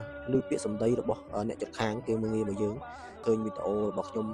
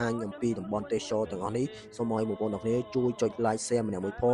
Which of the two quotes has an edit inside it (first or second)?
first